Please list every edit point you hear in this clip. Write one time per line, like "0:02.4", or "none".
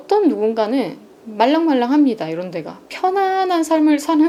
none